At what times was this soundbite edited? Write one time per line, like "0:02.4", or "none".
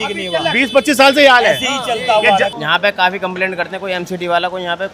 0:02.5